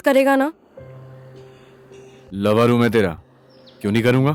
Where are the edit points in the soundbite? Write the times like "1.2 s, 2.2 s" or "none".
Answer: none